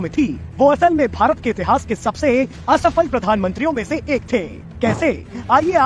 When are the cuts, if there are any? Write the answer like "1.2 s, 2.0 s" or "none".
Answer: none

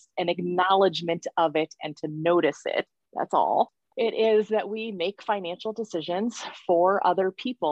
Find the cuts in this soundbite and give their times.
3.0 s, 3.8 s

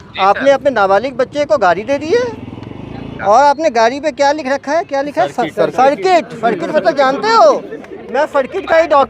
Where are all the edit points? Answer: 3.1 s

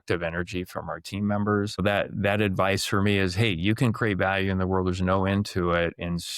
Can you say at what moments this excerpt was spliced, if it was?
1.8 s

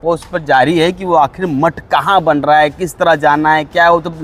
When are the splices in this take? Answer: none

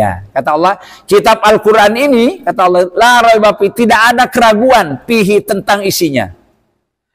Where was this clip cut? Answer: none

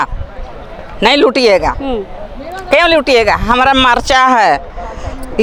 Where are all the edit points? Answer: none

